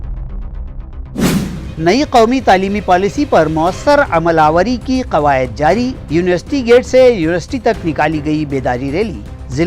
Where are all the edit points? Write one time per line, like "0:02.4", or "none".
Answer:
0:01.6